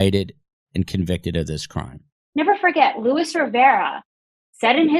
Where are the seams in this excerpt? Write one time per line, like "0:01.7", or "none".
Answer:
0:02.2